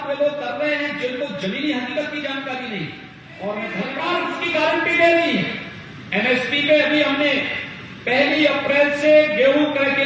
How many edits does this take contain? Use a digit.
1